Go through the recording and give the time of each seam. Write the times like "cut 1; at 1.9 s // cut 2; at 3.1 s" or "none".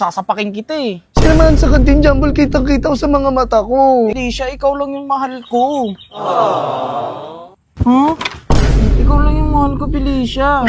cut 1; at 4.2 s